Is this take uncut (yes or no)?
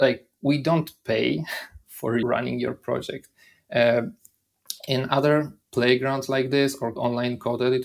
no